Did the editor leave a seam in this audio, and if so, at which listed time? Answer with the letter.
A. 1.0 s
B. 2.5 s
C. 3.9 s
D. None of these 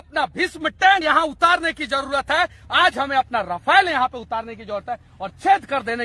A